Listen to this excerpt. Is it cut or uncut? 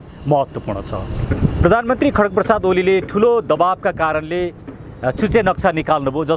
cut